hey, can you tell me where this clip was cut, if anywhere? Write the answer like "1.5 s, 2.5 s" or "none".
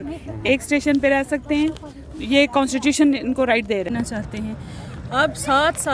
3.9 s